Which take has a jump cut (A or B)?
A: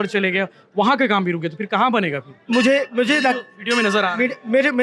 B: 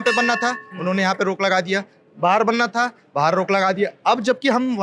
A